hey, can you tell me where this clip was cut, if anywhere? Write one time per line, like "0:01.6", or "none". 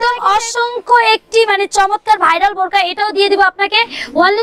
none